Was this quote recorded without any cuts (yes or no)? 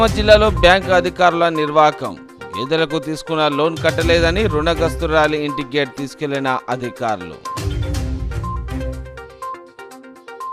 yes